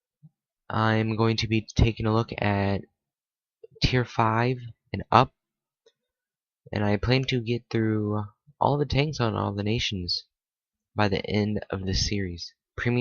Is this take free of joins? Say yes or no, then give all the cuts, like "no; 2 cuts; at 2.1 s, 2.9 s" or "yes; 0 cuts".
no; 1 cut; at 6.7 s